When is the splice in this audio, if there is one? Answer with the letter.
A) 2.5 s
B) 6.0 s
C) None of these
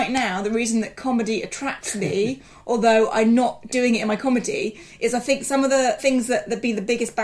B